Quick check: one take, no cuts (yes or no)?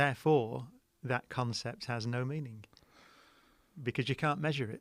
yes